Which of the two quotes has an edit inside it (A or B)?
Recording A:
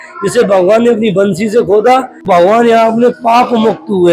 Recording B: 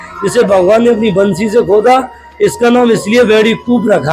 A